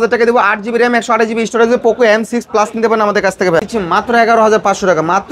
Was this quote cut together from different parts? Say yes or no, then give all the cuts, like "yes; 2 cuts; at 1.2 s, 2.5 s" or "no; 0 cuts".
yes; 1 cut; at 3.6 s